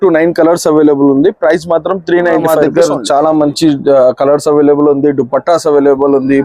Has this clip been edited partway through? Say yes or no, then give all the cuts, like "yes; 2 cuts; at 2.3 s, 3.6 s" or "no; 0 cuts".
yes; 1 cut; at 2.6 s